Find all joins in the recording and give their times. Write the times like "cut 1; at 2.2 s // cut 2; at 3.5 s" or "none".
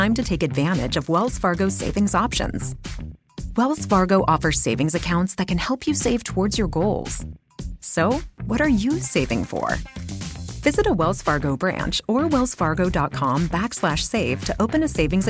none